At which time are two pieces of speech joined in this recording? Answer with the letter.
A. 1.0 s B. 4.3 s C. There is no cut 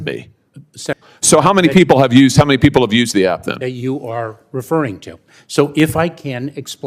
A